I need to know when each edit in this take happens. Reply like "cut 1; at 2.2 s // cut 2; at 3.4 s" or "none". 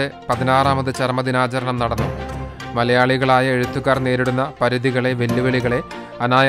none